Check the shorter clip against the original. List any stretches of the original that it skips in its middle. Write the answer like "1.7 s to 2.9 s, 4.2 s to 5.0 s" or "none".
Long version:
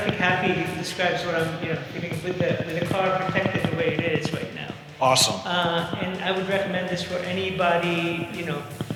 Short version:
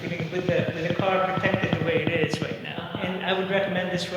4.8 s to 5.9 s